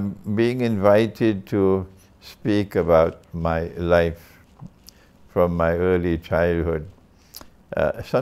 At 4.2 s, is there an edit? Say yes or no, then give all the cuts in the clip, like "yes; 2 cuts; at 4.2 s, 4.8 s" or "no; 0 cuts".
no; 0 cuts